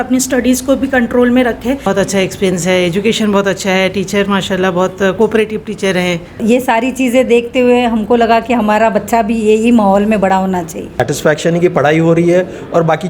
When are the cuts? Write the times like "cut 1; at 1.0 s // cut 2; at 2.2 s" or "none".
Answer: cut 1; at 1.8 s // cut 2; at 6.4 s // cut 3; at 10.8 s